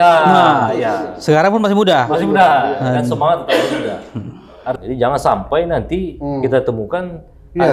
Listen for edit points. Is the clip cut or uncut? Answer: cut